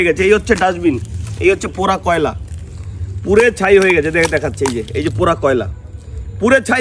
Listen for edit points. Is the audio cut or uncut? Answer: uncut